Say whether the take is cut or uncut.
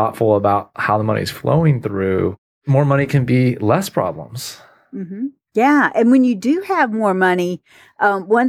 cut